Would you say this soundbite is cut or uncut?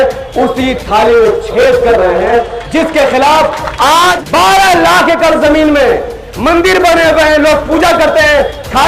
cut